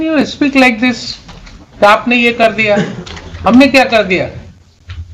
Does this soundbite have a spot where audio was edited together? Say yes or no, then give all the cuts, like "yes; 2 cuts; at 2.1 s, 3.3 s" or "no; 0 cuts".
no; 0 cuts